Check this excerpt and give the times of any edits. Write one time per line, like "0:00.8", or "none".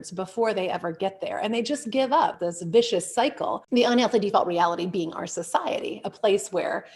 0:02.5
0:03.6